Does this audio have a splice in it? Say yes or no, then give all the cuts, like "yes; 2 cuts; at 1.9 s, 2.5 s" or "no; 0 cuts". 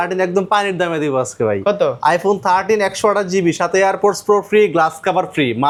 no; 0 cuts